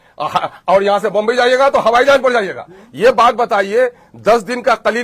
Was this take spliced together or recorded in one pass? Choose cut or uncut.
uncut